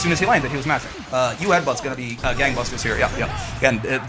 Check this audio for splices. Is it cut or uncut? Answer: cut